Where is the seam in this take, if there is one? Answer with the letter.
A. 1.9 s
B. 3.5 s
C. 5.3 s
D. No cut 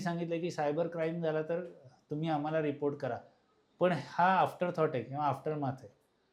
D